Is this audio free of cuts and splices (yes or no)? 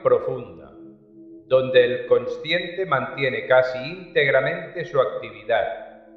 no